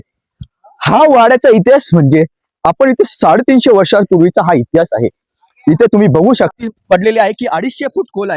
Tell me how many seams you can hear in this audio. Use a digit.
1